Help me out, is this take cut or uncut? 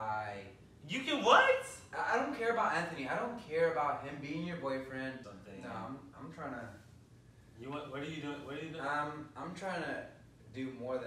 cut